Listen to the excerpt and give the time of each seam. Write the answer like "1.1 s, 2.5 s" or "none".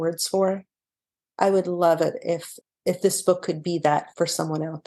2.5 s, 4.1 s